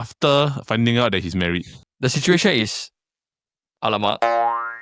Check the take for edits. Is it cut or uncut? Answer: cut